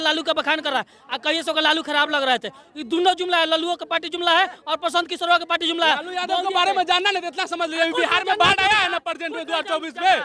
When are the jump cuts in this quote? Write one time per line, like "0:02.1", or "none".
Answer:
none